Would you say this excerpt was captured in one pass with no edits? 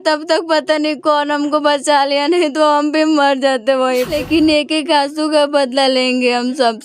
no; 1 cut; at 4.1 s

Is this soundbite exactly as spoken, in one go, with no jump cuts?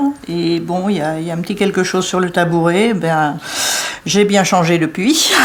yes; 0 cuts

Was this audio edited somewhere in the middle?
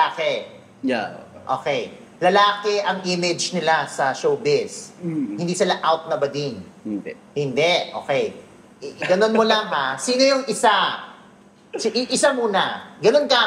no; 0 cuts

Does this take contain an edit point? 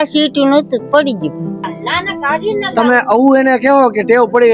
yes; 1 cut; at 1.6 s

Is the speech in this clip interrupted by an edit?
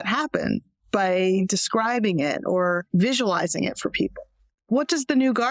yes; 1 cut; at 4.5 s

